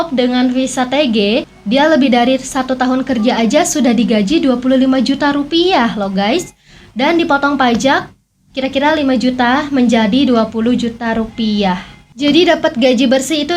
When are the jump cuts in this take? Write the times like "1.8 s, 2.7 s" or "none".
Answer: none